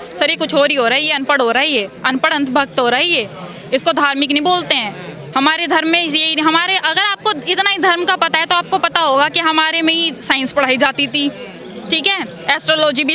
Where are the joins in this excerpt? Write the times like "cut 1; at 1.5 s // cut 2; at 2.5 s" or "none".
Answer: none

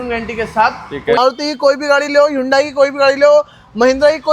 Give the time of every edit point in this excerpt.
cut 1; at 1.2 s

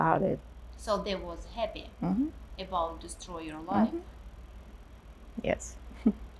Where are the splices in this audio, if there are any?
none

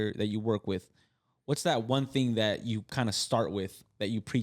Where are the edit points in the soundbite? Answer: none

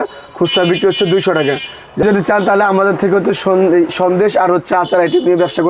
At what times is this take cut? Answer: cut 1; at 2.0 s

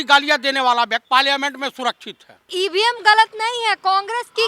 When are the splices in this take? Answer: cut 1; at 1.0 s // cut 2; at 2.4 s

